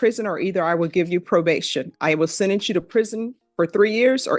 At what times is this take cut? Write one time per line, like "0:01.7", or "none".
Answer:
none